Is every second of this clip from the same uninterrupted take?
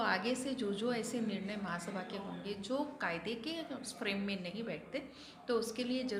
yes; 0 cuts

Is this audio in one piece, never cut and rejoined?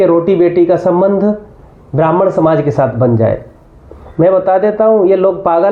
yes; 0 cuts

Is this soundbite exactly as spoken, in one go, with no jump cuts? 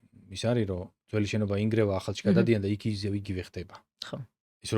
yes; 0 cuts

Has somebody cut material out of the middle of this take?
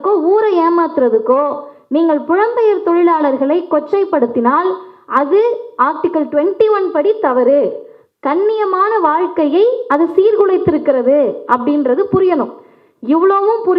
no; 0 cuts

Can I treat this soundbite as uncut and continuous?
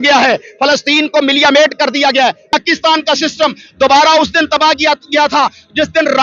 no; 1 cut; at 2.5 s

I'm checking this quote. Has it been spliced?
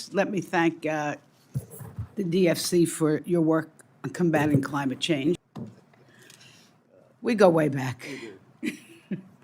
yes; 1 cut; at 5.4 s

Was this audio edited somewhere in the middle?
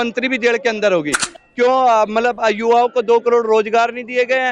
yes; 1 cut; at 1.3 s

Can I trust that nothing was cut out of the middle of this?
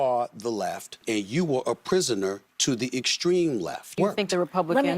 no; 2 cuts; at 1.0 s, 3.9 s

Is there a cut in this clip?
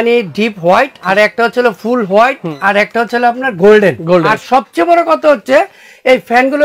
yes; 3 cuts; at 1.0 s, 2.5 s, 4.4 s

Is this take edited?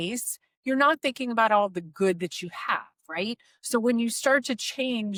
no; 0 cuts

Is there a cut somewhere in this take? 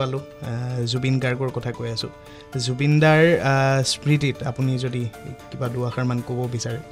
no; 0 cuts

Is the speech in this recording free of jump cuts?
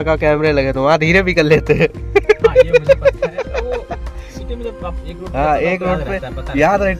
yes; 0 cuts

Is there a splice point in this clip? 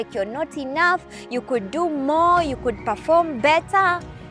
no; 0 cuts

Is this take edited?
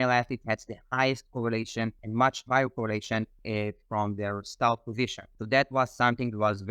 no; 0 cuts

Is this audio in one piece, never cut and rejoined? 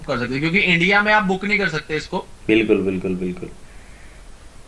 yes; 0 cuts

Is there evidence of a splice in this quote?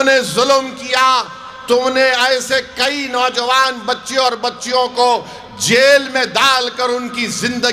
no; 0 cuts

